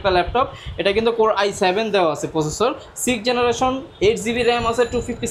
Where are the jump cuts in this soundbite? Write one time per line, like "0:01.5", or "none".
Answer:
none